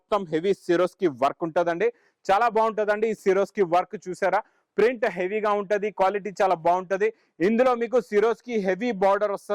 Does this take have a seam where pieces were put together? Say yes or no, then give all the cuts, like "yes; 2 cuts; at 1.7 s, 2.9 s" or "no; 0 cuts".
no; 0 cuts